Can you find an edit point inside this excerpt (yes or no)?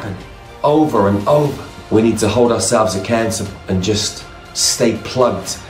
yes